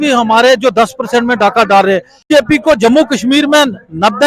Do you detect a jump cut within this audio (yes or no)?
yes